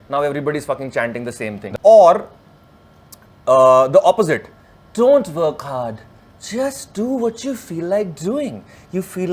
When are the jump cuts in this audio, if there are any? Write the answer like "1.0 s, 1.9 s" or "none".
1.6 s